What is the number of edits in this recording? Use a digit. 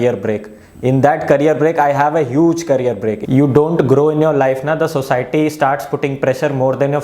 1